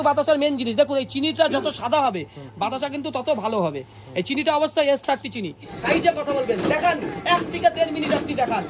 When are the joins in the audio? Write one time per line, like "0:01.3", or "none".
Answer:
0:05.7